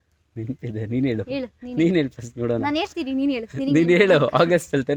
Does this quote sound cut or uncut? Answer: uncut